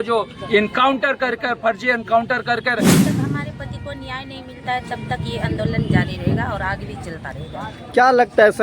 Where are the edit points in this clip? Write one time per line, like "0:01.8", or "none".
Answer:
0:02.9